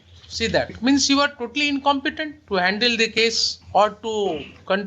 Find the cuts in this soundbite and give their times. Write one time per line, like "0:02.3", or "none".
0:00.8
0:02.3
0:03.5

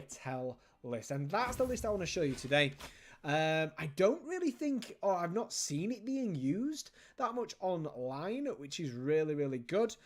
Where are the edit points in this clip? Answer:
0:01.4

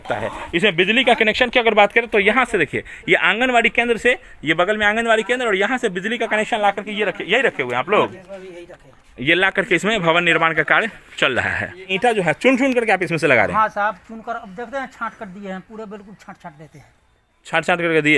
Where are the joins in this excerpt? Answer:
0:11.9

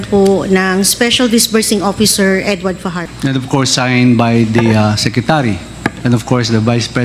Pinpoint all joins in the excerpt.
0:02.9

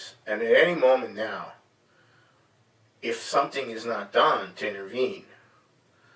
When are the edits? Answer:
0:04.8

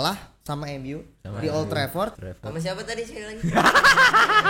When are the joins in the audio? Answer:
0:02.2

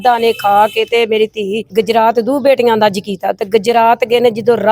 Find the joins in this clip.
0:01.6

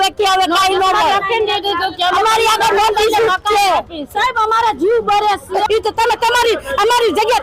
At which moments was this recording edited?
0:05.7

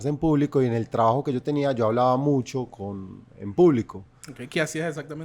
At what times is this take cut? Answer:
none

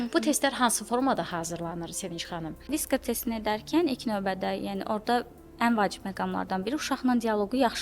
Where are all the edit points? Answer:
0:02.6

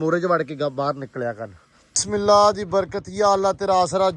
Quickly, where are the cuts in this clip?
0:02.0

